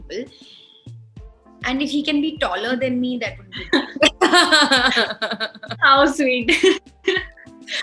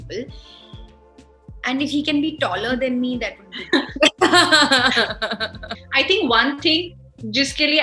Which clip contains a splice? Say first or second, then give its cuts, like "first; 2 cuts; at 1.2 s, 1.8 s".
second; 1 cut; at 5.6 s